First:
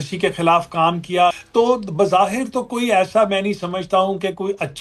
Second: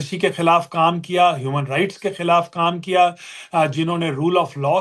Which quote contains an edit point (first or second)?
first